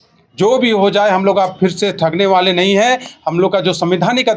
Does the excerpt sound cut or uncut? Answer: uncut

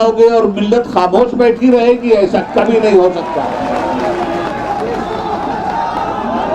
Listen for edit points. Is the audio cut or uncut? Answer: uncut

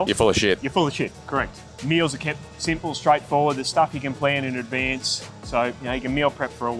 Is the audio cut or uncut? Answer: uncut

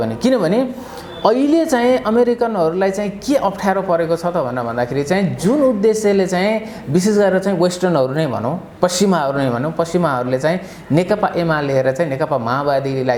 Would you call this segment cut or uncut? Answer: uncut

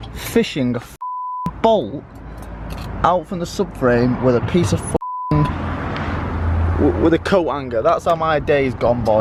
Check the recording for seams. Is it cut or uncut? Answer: uncut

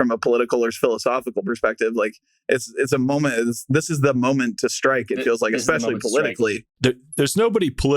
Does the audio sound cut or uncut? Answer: cut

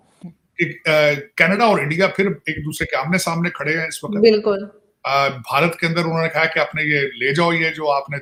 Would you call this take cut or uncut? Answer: uncut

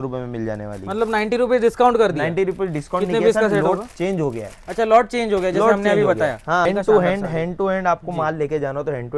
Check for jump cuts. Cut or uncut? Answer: cut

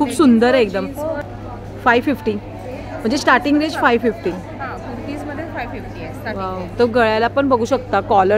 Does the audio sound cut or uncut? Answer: cut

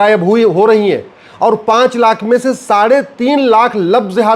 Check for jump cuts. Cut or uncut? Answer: uncut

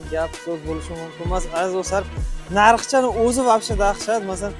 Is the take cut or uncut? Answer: uncut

